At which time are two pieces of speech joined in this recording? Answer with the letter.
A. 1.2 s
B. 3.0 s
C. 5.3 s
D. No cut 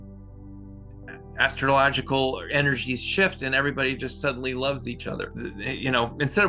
C